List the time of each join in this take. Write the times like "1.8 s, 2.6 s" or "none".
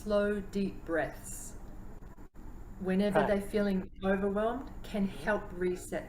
none